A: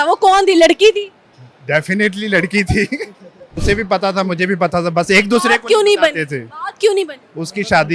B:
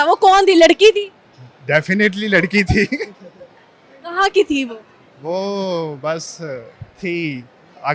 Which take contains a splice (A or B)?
A